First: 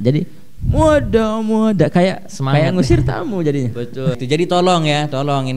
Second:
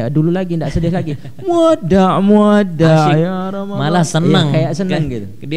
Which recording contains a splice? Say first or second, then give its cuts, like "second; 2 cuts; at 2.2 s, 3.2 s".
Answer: first; 1 cut; at 4.2 s